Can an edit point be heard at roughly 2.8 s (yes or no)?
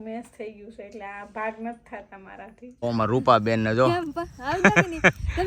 yes